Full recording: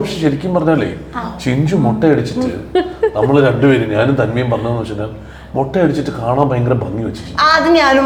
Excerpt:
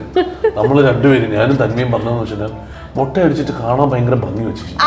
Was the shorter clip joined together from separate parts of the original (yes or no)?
no